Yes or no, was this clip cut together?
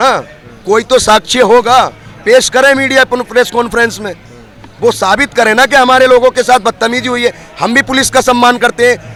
no